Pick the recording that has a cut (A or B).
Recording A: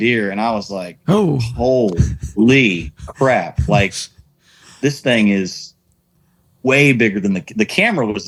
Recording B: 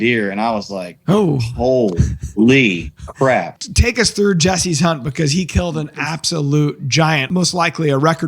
B